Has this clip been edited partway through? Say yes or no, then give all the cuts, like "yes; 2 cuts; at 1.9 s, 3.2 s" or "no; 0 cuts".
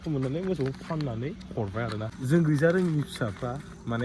yes; 1 cut; at 2.1 s